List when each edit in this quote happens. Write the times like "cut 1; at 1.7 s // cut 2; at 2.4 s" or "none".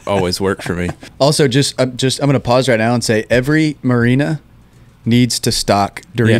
cut 1; at 1.0 s